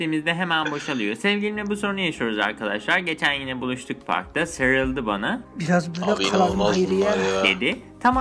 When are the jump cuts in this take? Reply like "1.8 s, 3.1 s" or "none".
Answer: 1.3 s